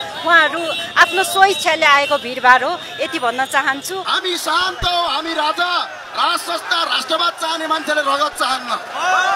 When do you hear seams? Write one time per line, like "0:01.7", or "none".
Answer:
0:04.0